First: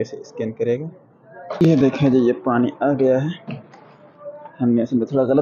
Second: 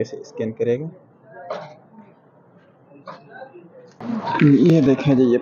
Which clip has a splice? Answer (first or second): first